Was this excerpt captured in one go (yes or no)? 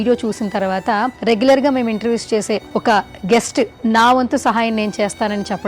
no